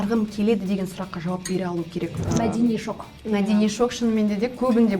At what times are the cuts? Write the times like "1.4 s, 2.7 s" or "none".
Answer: 2.1 s